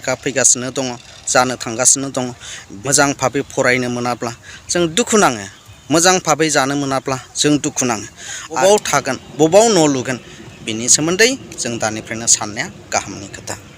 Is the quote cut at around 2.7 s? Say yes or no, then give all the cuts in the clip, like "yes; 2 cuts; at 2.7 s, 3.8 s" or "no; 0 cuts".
yes; 2 cuts; at 2.7 s, 8.6 s